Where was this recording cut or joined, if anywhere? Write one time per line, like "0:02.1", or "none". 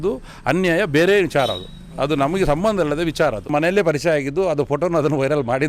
0:03.5